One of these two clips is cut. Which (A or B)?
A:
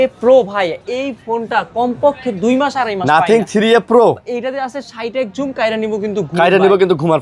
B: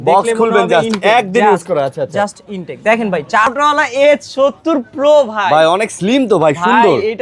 B